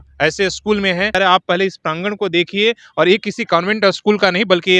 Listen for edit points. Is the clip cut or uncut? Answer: uncut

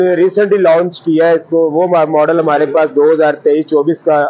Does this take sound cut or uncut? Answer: uncut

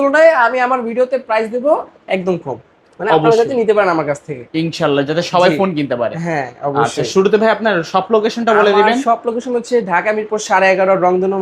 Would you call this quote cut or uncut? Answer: uncut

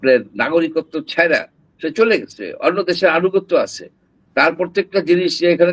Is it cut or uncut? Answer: uncut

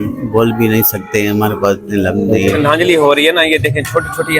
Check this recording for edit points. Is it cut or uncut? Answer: cut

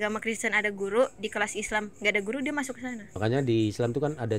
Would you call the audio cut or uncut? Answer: cut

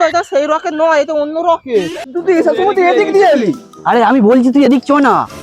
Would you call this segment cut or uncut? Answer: cut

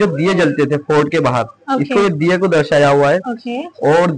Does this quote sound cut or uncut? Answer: uncut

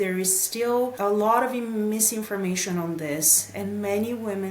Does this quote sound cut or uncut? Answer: cut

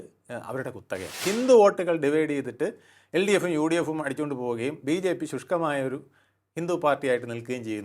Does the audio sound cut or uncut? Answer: cut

